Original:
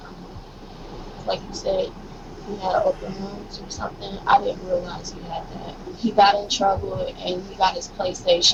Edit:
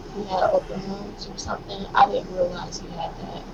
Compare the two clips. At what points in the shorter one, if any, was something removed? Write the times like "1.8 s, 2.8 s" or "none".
none